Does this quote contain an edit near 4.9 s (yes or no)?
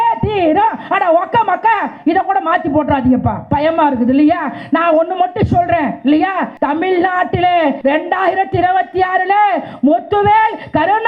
no